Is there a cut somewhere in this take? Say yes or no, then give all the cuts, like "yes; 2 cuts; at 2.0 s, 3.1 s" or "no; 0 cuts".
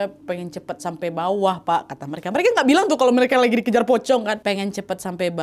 yes; 1 cut; at 4.4 s